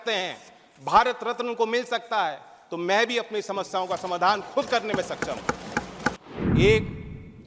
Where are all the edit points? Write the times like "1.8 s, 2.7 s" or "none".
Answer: 6.2 s